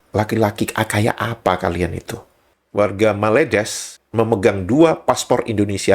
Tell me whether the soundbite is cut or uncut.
cut